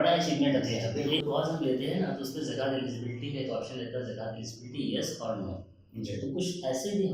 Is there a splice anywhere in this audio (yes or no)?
yes